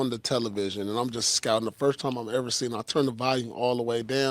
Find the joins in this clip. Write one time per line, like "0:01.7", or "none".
none